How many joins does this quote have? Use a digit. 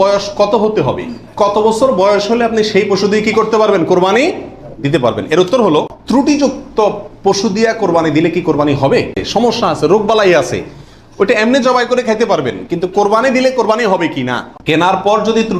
3